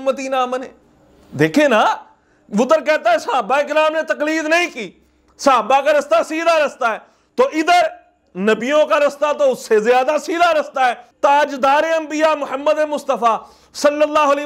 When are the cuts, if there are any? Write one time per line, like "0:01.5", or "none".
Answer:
0:11.1